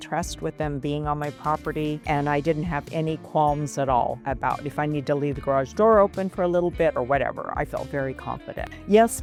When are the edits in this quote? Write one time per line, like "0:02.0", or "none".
none